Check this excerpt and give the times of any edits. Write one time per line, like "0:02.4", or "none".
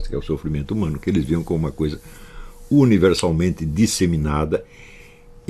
none